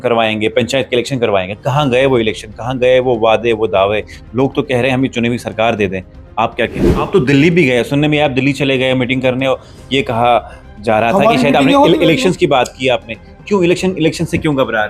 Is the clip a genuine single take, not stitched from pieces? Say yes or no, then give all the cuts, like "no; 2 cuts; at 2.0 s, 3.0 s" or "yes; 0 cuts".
no; 1 cut; at 6.9 s